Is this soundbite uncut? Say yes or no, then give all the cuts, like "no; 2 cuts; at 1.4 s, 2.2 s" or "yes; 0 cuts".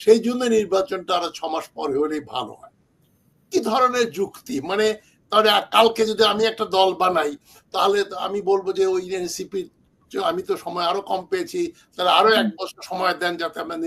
yes; 0 cuts